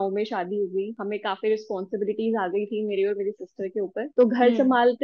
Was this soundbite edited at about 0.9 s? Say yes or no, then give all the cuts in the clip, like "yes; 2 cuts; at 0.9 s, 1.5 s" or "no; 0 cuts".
yes; 1 cut; at 0.9 s